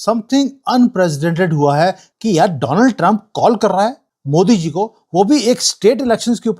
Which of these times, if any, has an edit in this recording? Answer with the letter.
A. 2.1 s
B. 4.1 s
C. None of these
A